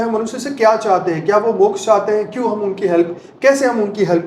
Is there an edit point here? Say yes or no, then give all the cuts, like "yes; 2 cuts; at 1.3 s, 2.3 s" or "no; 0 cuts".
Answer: no; 0 cuts